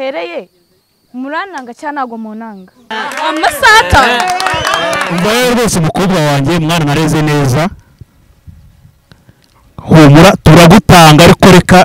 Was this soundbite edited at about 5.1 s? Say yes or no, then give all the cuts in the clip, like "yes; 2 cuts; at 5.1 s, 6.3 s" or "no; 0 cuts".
yes; 1 cut; at 5.1 s